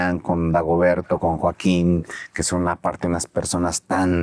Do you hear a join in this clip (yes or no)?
no